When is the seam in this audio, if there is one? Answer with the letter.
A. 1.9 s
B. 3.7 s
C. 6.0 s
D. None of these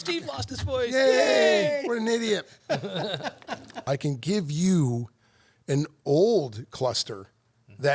B